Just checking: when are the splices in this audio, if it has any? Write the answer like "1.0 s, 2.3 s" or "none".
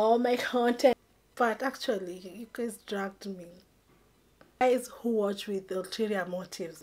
0.9 s, 4.6 s

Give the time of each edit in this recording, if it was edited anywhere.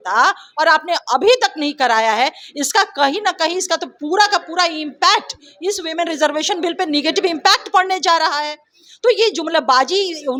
none

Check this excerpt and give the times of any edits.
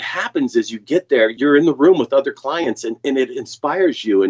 none

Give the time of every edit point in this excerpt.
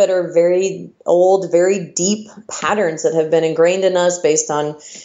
2.4 s

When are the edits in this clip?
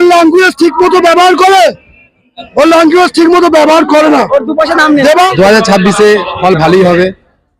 5.1 s

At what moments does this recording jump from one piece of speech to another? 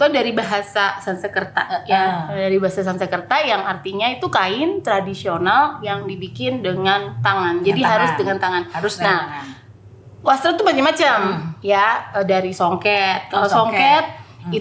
none

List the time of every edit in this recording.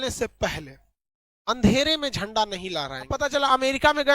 3.1 s

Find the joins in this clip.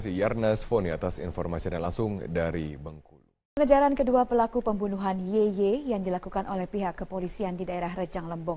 none

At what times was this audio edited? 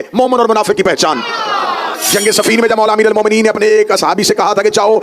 1.9 s

